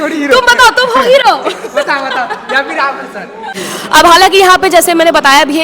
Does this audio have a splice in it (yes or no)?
yes